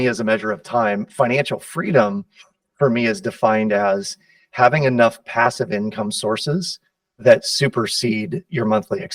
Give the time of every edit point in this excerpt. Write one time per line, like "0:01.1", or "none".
none